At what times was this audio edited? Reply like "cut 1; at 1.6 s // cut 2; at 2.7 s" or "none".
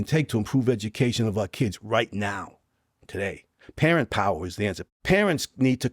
cut 1; at 4.8 s